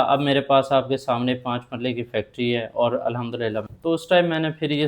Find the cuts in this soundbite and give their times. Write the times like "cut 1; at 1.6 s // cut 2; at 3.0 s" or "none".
cut 1; at 3.7 s